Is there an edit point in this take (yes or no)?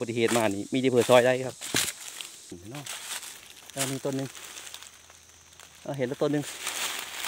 yes